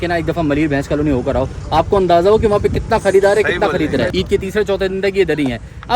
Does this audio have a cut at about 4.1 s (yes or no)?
yes